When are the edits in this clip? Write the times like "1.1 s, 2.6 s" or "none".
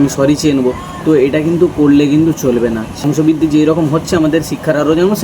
2.9 s